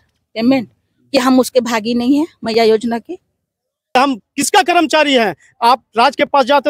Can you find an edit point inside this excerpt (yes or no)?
yes